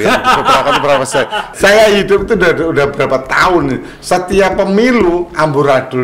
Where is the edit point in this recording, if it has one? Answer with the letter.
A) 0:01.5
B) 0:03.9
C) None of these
A